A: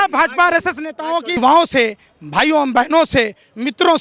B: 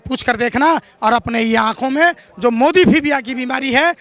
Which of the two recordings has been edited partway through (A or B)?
A